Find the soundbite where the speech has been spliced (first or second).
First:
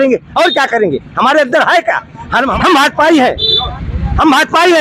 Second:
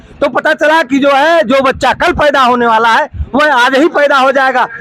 first